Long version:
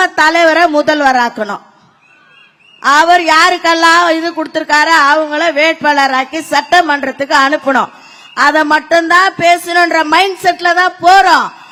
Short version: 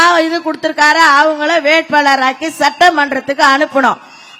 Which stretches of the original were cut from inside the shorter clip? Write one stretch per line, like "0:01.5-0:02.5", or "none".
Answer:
none